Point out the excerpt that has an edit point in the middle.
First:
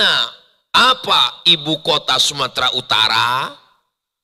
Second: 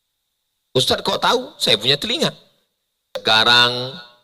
second; 1 cut; at 3.2 s

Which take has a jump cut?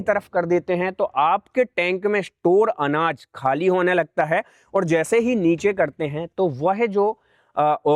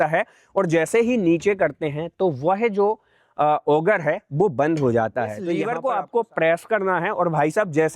second; 1 cut; at 5.7 s

